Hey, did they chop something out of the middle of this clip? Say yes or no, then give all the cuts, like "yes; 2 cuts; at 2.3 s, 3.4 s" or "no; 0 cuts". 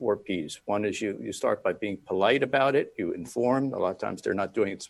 no; 0 cuts